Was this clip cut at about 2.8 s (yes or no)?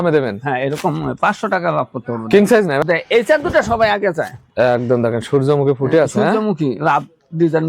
yes